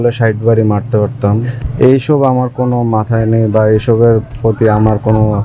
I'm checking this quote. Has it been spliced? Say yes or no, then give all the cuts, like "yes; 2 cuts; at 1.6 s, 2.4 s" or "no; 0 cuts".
yes; 1 cut; at 1.5 s